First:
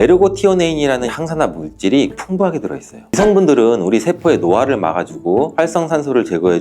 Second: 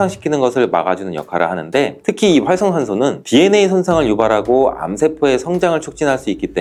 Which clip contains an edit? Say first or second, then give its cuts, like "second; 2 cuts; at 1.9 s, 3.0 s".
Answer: first; 1 cut; at 3.2 s